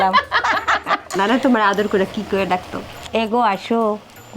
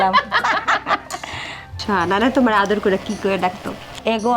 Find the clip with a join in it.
first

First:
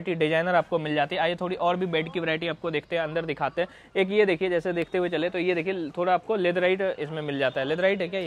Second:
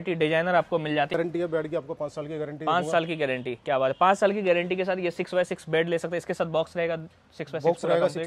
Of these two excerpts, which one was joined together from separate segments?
second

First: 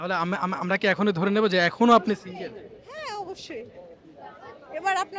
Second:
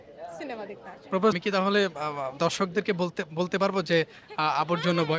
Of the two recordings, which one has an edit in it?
second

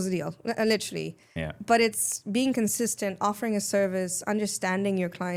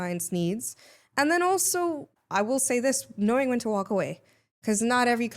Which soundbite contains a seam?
second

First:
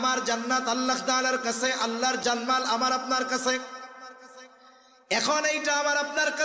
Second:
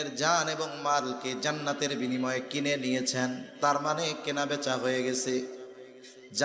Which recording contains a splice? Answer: first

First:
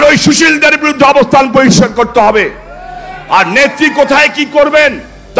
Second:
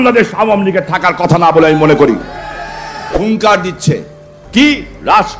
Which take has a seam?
second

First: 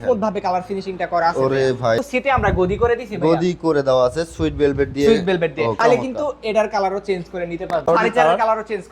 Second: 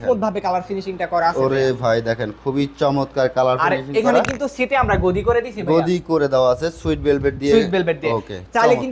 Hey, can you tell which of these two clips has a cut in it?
first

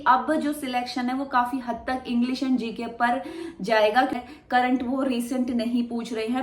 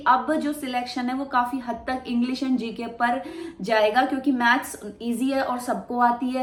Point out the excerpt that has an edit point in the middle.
first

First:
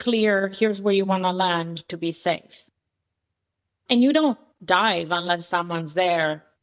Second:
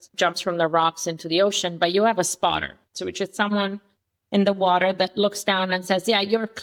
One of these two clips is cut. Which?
first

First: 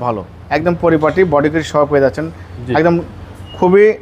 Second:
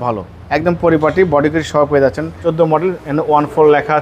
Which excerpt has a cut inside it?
second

